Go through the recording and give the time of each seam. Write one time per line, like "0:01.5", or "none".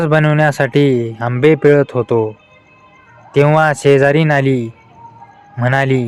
none